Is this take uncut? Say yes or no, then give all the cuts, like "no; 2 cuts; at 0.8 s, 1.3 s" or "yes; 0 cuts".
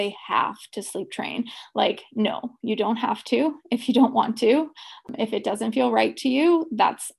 no; 1 cut; at 5.0 s